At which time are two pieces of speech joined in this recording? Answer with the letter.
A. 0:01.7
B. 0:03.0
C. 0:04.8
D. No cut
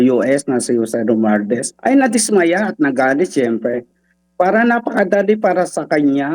A